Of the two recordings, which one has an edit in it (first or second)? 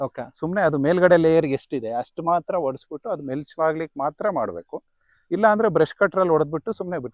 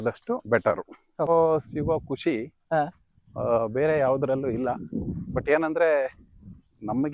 second